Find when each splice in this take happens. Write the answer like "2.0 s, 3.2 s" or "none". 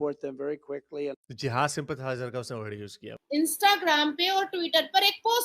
3.1 s